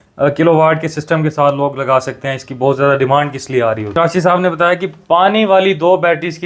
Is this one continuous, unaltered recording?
no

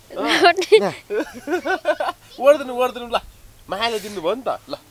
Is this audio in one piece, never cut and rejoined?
yes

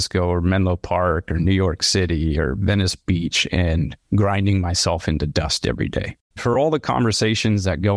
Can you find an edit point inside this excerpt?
yes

